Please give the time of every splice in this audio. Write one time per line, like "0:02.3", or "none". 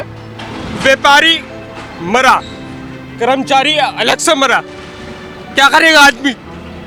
none